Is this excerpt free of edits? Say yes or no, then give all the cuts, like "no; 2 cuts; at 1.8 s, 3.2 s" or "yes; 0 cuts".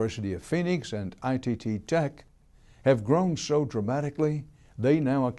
yes; 0 cuts